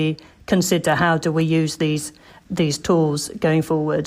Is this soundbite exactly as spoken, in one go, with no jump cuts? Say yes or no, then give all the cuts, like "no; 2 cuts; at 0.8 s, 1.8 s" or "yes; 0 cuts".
yes; 0 cuts